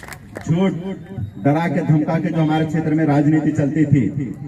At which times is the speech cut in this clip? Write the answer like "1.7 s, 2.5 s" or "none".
none